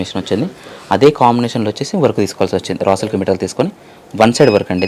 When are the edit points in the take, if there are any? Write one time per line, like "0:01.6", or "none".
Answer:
none